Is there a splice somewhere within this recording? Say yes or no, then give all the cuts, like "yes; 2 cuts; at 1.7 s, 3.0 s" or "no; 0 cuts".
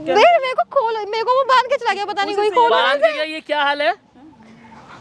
no; 0 cuts